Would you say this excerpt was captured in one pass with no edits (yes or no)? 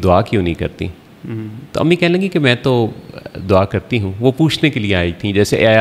yes